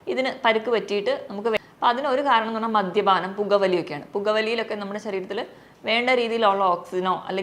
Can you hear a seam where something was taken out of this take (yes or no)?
yes